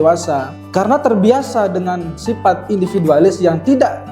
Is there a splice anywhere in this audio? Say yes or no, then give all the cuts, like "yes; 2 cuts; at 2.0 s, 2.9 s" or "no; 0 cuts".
no; 0 cuts